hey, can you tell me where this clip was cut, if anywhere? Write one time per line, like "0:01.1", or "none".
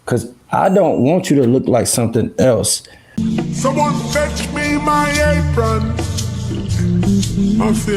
0:03.0